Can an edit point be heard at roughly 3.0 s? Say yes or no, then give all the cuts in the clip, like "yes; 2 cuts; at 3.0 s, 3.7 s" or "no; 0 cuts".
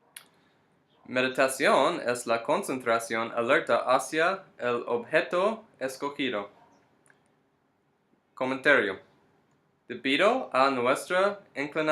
yes; 1 cut; at 3.0 s